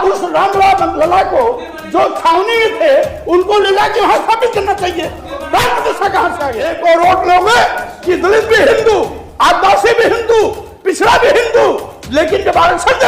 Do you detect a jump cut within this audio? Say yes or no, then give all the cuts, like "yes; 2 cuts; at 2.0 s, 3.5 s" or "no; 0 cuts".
yes; 1 cut; at 6.7 s